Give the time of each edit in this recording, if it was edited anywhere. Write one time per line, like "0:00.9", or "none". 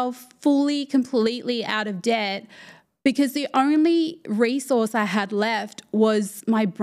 none